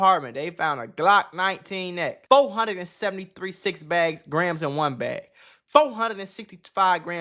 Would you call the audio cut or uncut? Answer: cut